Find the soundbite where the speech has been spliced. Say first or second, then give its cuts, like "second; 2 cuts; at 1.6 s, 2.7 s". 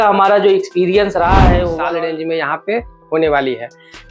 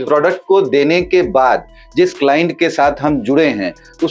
first; 1 cut; at 1.8 s